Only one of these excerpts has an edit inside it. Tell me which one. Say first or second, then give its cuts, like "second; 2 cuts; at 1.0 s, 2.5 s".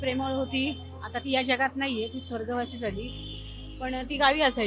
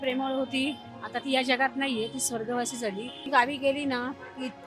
second; 1 cut; at 3.3 s